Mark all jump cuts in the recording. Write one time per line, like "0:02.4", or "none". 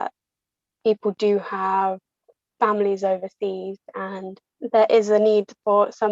0:04.4